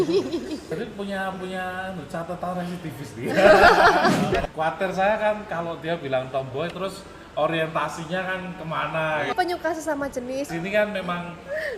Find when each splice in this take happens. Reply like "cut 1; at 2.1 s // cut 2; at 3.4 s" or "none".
cut 1; at 0.7 s // cut 2; at 4.5 s // cut 3; at 9.3 s // cut 4; at 10.5 s